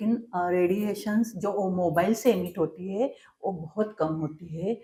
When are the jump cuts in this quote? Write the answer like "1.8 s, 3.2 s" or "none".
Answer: none